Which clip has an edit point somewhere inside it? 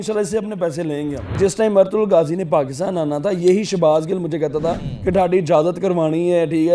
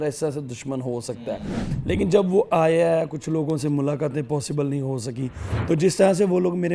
first; 2 cuts; at 1.4 s, 4.9 s

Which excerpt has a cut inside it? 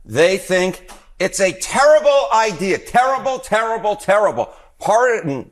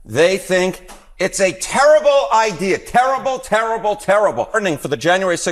second; 1 cut; at 4.6 s

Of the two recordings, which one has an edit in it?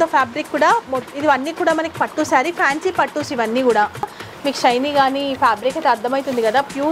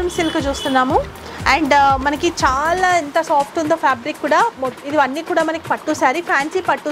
first; 1 cut; at 4.2 s

